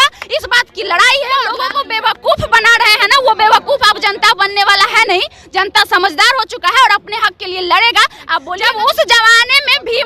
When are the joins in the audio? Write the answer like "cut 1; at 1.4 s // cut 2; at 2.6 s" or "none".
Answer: cut 1; at 1.5 s // cut 2; at 8.5 s

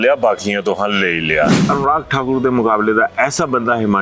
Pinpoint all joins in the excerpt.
cut 1; at 1.6 s

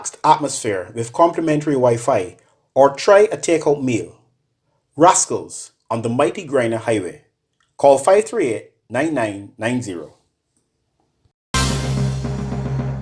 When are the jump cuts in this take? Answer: cut 1; at 11.5 s

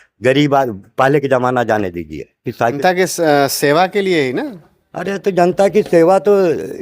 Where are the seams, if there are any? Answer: cut 1; at 2.8 s

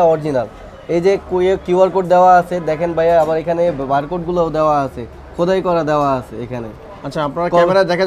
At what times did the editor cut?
none

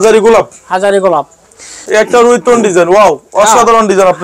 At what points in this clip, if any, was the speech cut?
cut 1; at 1.8 s

